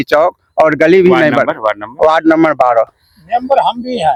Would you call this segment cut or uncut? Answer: uncut